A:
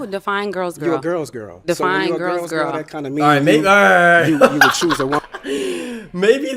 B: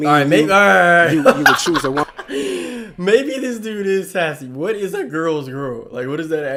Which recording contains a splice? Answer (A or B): A